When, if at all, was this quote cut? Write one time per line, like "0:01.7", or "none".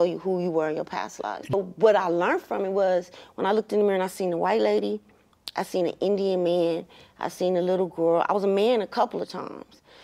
0:01.5